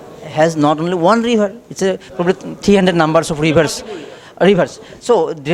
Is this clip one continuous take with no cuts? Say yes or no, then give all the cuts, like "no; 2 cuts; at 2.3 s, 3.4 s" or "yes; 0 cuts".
yes; 0 cuts